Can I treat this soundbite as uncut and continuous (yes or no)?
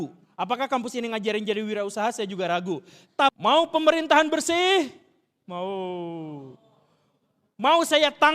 no